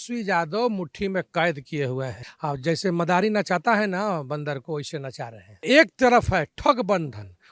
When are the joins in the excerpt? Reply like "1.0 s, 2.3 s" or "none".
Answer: 5.6 s